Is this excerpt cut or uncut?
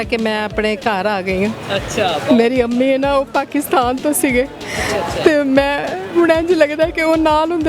uncut